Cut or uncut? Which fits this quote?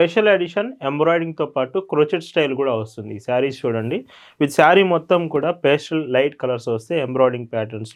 uncut